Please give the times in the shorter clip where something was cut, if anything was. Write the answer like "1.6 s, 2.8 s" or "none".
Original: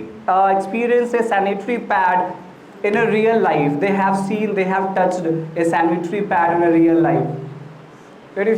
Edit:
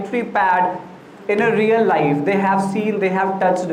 none